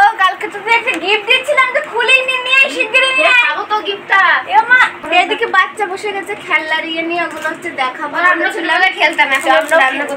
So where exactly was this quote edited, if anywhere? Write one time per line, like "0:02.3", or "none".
0:05.0